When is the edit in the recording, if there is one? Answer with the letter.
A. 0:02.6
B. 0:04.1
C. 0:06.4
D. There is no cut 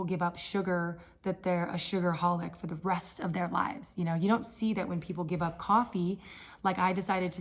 D